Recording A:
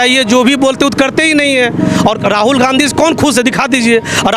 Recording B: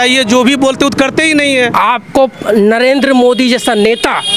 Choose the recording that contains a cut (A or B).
B